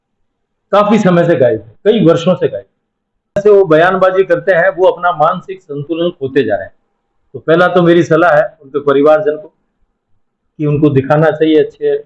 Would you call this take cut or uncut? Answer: cut